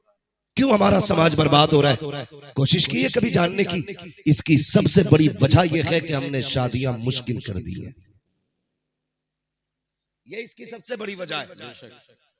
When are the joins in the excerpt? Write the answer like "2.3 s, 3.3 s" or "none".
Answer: none